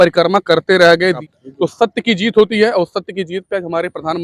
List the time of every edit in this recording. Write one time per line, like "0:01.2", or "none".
0:01.2